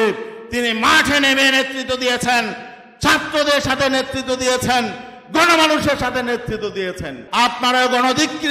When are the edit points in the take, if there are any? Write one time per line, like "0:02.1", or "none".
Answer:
0:07.2